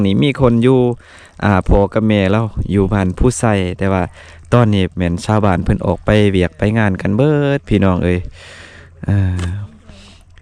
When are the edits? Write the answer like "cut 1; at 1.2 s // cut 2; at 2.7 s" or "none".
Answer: none